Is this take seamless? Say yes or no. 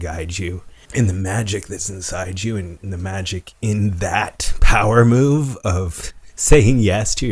yes